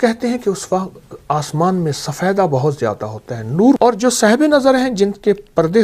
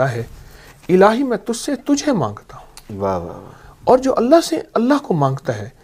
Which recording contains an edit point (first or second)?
first